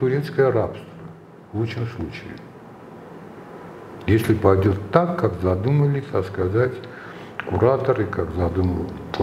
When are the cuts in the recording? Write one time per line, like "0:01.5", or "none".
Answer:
none